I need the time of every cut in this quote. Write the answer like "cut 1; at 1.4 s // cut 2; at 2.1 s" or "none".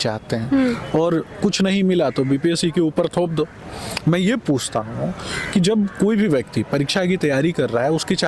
none